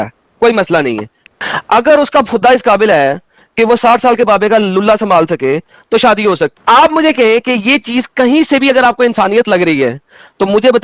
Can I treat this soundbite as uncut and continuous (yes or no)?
no